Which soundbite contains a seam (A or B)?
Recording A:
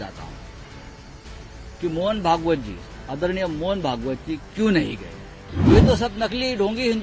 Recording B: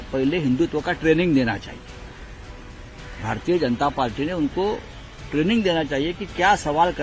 A